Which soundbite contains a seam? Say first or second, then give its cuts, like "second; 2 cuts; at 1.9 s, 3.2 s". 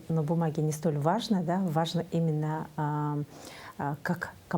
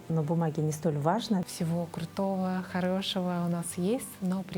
second; 1 cut; at 1.4 s